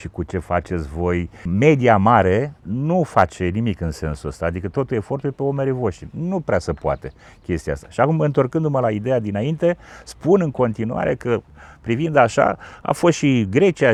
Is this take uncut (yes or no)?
yes